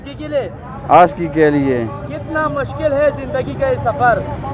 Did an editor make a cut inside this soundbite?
no; 0 cuts

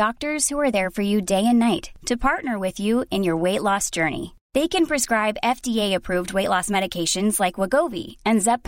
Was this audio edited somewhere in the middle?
no; 0 cuts

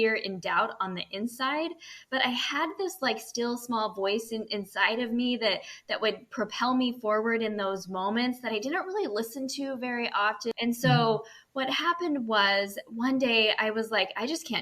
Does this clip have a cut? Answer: yes; 1 cut; at 10.5 s

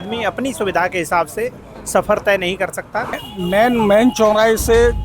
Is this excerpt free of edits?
no; 1 cut; at 3.3 s

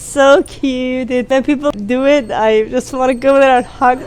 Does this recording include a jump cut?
yes; 1 cut; at 1.7 s

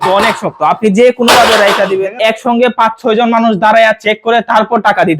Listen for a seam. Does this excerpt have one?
yes; 1 cut; at 2.2 s

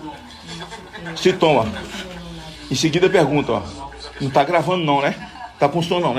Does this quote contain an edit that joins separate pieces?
no; 0 cuts

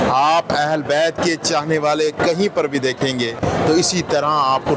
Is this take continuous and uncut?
no; 1 cut; at 3.4 s

